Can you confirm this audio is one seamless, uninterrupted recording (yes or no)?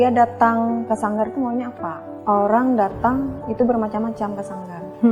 no